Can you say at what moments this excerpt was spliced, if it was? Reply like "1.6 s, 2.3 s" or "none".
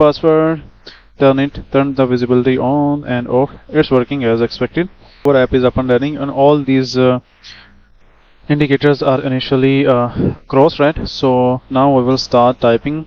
5.2 s